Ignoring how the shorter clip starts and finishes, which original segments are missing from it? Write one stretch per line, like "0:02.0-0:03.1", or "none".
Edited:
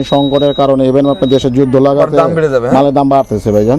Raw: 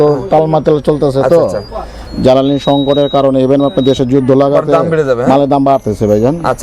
none